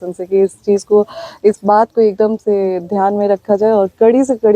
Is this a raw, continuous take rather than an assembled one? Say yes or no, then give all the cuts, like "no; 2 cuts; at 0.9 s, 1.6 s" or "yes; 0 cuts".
yes; 0 cuts